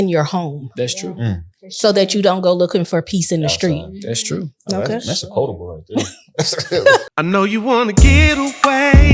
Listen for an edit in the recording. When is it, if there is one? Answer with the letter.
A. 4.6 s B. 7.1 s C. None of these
B